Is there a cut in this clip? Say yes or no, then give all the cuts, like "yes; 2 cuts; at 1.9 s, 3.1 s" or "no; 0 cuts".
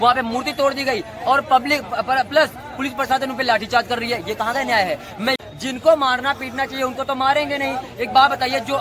yes; 1 cut; at 5.4 s